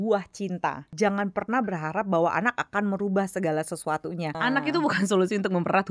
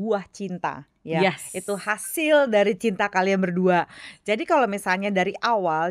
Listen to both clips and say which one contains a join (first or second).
first